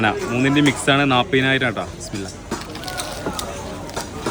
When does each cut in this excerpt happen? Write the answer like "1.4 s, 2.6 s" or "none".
none